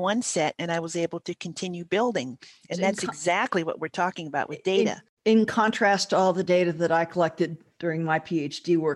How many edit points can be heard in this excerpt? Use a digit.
0